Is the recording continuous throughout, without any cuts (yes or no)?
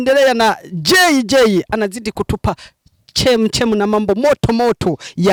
yes